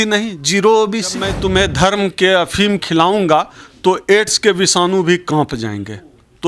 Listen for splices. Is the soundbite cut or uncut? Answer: cut